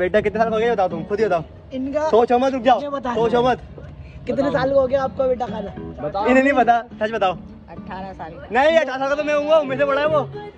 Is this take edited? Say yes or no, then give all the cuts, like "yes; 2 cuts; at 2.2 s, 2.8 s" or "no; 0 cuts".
no; 0 cuts